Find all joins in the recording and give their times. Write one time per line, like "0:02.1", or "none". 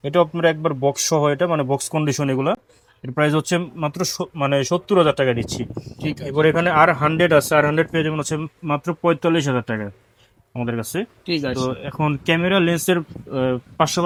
none